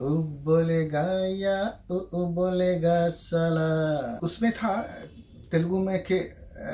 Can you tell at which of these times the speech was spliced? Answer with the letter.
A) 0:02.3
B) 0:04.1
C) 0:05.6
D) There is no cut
B